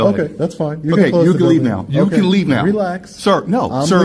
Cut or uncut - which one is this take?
uncut